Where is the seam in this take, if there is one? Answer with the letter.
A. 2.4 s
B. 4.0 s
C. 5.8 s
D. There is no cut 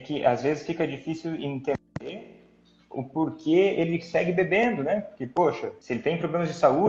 C